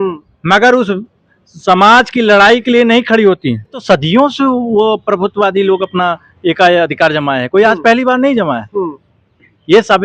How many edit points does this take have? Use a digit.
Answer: 1